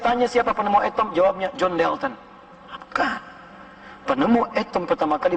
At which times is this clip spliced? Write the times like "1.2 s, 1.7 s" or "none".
none